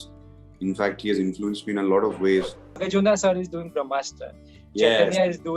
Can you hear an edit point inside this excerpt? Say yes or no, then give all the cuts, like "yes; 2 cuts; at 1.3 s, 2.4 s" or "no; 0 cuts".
yes; 1 cut; at 2.8 s